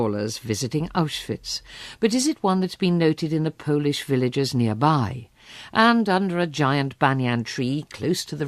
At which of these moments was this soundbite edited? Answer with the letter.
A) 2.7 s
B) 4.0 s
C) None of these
A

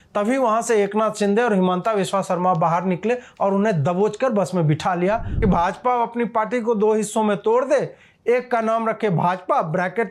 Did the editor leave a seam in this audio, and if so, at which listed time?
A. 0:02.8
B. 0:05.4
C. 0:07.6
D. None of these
B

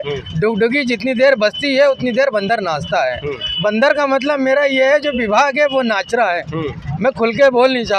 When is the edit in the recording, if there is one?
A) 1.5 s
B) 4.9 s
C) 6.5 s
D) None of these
D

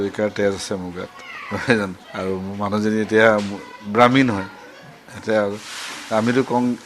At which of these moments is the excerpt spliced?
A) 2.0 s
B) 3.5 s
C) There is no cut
A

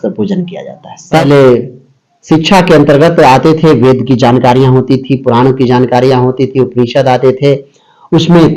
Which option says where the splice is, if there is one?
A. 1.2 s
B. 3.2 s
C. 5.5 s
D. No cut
A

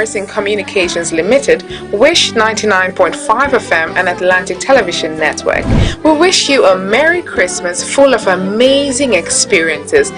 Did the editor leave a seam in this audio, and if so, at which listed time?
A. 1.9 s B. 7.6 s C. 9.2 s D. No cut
C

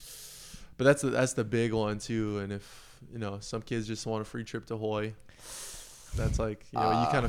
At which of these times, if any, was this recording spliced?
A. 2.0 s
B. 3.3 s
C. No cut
C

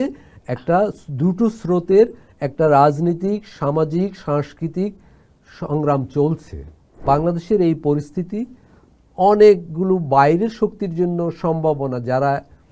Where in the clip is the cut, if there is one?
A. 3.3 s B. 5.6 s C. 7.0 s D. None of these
C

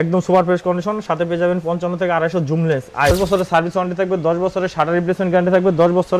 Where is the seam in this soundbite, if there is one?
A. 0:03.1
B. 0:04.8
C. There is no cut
A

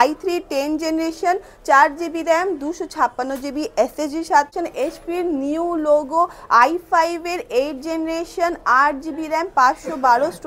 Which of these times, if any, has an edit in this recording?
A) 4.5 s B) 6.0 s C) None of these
A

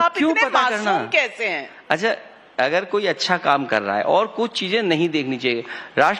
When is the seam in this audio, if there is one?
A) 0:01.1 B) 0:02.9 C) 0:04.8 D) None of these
B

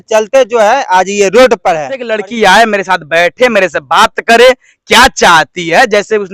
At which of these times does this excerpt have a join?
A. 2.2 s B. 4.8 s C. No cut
A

